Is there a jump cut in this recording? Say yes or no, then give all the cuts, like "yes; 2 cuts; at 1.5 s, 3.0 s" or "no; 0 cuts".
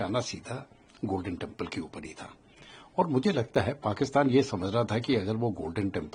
no; 0 cuts